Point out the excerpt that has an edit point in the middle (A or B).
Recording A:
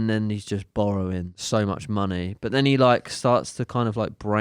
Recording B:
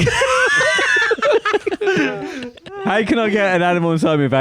A